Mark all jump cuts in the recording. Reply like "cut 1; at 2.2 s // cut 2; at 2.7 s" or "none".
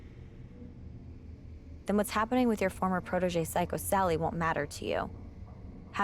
cut 1; at 1.9 s